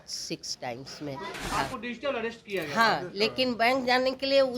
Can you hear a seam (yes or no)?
yes